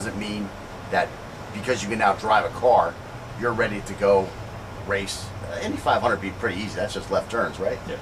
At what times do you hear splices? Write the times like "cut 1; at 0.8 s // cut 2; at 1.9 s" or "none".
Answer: cut 1; at 6.2 s